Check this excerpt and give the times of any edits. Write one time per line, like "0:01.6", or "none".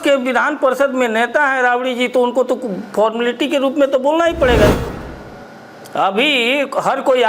0:04.8

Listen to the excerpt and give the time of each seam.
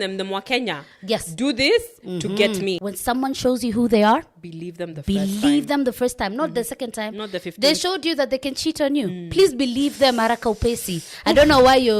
0:02.9

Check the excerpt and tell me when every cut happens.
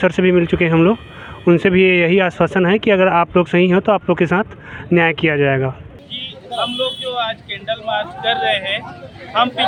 none

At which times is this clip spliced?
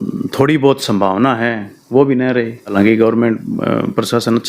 0:02.7

